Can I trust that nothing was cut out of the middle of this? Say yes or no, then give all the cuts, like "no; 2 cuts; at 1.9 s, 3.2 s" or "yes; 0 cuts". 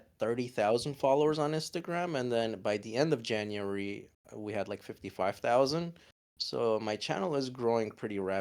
yes; 0 cuts